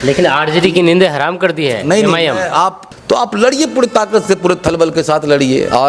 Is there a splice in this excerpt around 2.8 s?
yes; 1 cut; at 2.8 s

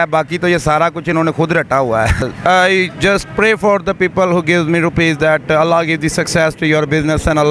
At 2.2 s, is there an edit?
yes; 1 cut; at 2.2 s

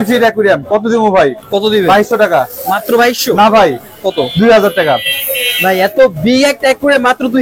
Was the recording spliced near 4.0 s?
no; 0 cuts

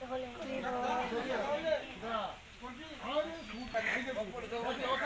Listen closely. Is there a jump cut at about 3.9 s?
yes; 1 cut; at 3.9 s

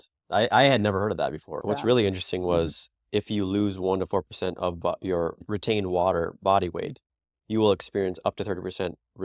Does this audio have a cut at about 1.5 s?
yes; 1 cut; at 1.5 s

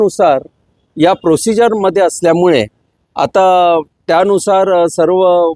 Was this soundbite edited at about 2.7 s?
no; 0 cuts

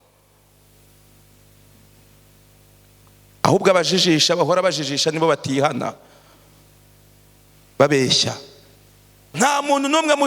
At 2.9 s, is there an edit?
no; 1 cut; at 9.2 s

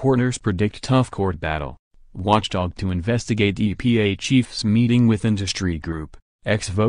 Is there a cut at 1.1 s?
yes; 1 cut; at 1.1 s

